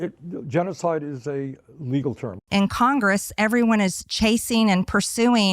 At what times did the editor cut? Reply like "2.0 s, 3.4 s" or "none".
2.4 s